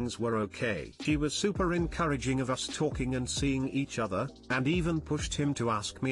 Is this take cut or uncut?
cut